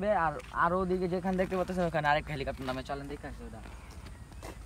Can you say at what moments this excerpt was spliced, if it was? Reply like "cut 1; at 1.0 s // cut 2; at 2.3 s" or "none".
none